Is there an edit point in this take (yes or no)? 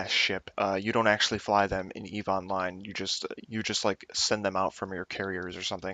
yes